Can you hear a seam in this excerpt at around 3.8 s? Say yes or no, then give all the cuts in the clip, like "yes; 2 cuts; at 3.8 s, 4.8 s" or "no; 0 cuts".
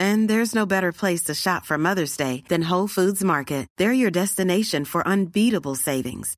no; 0 cuts